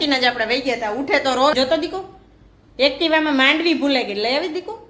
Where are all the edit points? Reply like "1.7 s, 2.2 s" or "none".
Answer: 1.5 s